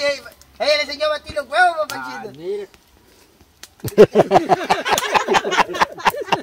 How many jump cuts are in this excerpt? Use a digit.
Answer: 0